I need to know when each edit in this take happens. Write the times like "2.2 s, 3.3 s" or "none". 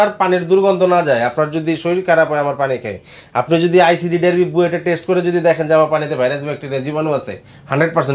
none